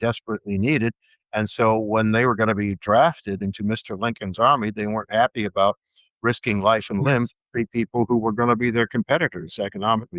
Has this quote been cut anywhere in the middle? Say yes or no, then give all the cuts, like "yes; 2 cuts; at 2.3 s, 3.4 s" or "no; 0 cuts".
no; 0 cuts